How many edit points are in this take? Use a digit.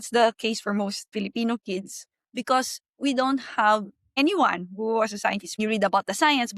3